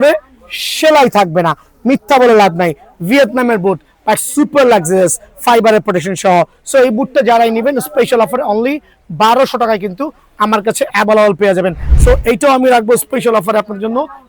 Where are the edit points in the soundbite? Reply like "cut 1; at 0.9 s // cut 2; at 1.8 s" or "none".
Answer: cut 1; at 11.9 s

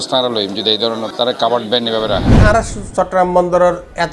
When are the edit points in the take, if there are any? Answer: cut 1; at 2.4 s

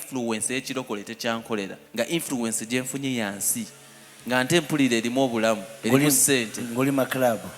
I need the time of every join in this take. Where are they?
cut 1; at 1.8 s

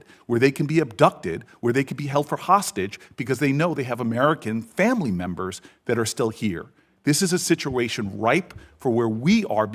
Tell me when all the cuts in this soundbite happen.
none

